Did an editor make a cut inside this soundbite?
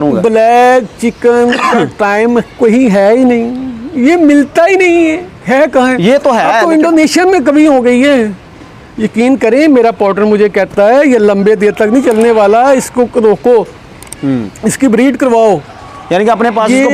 no; 0 cuts

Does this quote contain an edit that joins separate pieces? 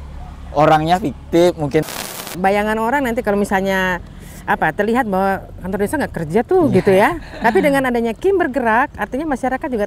yes; 1 cut; at 2.3 s

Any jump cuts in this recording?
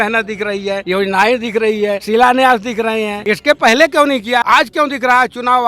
yes; 4 cuts; at 0.8 s, 2.0 s, 3.1 s, 4.4 s

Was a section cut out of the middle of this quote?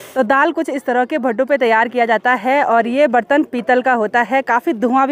no; 0 cuts

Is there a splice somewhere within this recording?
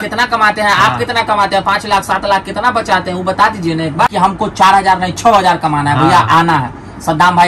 yes; 1 cut; at 4.1 s

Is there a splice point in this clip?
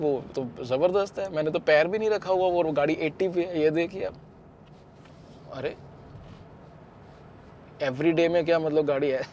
yes; 1 cut; at 4.1 s

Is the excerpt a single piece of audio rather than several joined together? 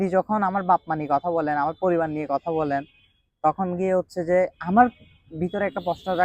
yes; 0 cuts

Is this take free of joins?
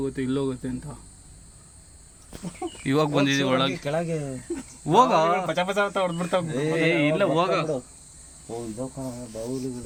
yes; 0 cuts

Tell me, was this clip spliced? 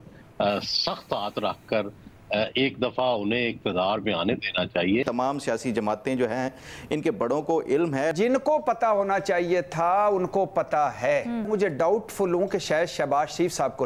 yes; 3 cuts; at 5.0 s, 8.1 s, 11.5 s

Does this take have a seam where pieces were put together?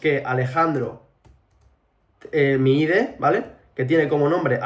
no; 0 cuts

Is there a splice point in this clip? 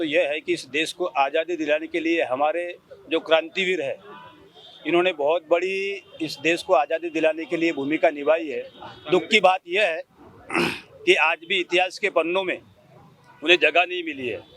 no; 0 cuts

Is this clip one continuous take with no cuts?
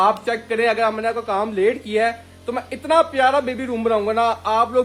yes; 0 cuts

